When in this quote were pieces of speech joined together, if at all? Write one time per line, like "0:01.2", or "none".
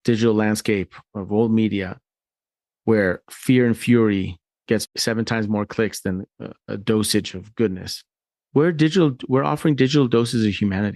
0:04.9